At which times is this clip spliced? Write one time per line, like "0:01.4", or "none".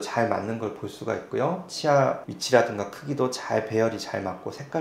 none